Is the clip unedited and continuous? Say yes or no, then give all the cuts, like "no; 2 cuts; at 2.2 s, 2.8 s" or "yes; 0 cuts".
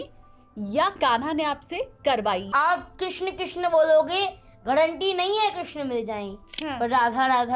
no; 1 cut; at 2.5 s